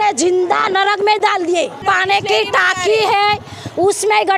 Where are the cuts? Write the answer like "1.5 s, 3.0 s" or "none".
1.8 s